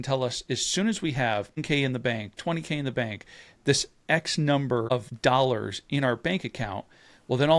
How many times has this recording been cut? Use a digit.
2